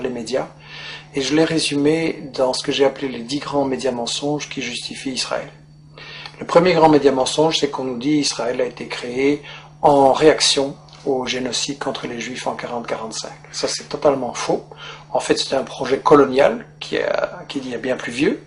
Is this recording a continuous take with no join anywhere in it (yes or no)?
no